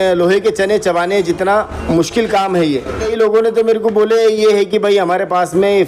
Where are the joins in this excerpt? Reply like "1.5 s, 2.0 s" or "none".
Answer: 3.1 s

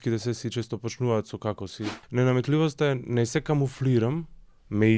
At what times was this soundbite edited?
2.0 s

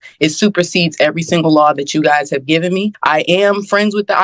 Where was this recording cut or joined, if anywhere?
3.0 s

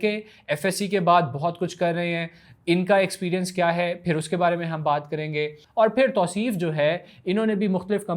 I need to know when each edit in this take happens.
5.6 s

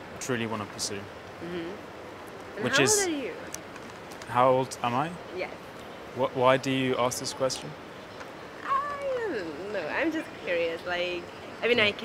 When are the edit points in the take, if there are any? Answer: none

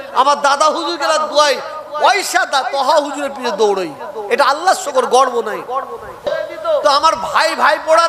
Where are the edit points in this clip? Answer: 6.3 s

